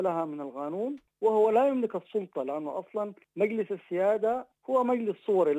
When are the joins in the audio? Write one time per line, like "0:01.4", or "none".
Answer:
0:01.0
0:03.2
0:04.5